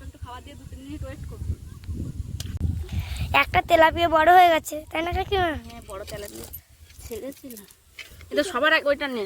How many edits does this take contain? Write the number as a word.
one